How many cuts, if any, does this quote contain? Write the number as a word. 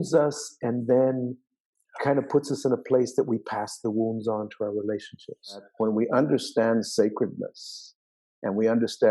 one